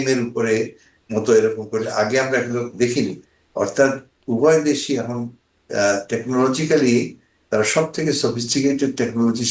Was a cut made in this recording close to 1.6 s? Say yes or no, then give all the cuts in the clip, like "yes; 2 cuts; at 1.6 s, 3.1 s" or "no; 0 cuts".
no; 0 cuts